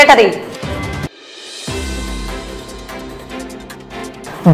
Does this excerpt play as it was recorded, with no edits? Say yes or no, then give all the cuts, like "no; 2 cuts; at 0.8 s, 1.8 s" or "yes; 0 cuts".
yes; 0 cuts